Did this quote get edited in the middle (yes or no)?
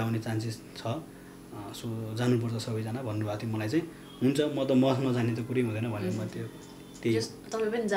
no